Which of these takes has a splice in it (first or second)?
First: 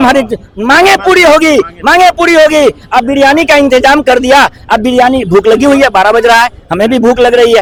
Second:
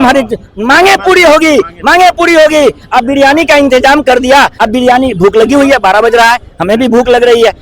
second